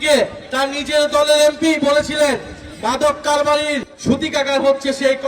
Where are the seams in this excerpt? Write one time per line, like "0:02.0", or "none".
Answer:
0:03.9